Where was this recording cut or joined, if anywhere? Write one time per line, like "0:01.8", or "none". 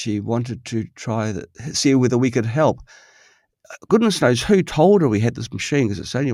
none